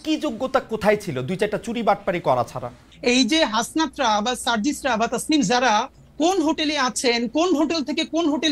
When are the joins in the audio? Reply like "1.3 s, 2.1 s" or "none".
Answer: 2.9 s